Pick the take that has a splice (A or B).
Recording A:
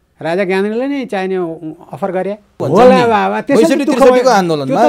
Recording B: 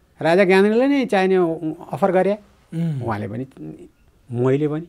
A